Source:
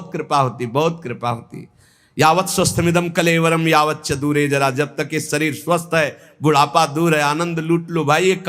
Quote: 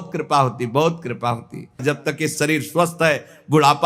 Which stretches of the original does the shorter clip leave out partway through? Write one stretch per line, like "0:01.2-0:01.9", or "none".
0:01.8-0:04.7